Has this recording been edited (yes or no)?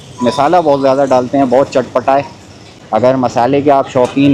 no